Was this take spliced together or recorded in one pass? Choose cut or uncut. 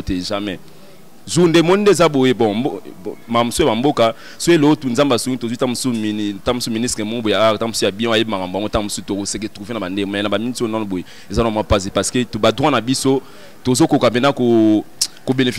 uncut